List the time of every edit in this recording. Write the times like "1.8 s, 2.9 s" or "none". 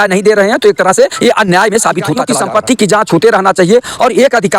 2.3 s